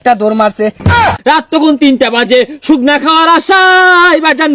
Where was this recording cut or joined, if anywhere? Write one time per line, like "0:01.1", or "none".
0:01.0